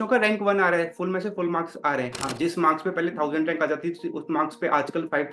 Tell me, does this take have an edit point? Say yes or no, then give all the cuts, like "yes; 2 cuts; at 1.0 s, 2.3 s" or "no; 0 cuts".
yes; 1 cut; at 2.2 s